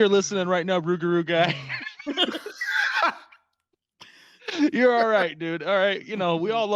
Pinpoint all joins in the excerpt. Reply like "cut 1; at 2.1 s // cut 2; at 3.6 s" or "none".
none

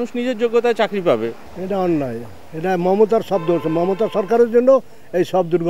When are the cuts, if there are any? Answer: cut 1; at 1.5 s

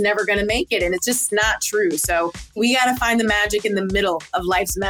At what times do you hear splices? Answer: cut 1; at 1.2 s // cut 2; at 2.5 s

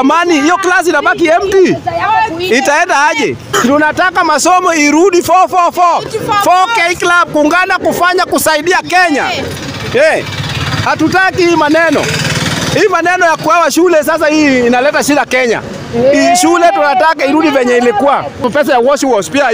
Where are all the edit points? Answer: cut 1; at 3.5 s // cut 2; at 18.4 s

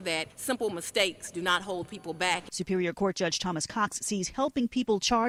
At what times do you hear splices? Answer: none

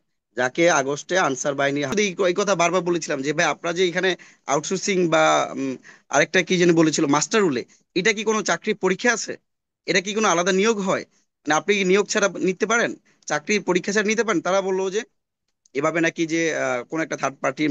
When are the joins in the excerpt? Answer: cut 1; at 1.9 s

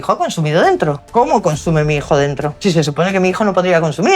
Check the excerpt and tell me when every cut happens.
cut 1; at 1.0 s // cut 2; at 2.6 s

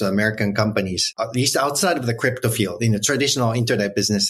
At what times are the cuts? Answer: cut 1; at 1.2 s

